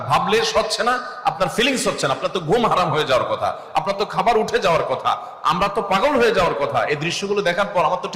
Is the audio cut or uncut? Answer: uncut